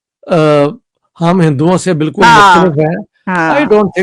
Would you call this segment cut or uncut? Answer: uncut